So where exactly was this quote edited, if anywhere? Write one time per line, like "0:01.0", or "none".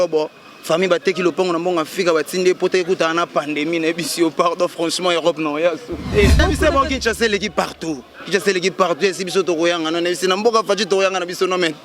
0:06.4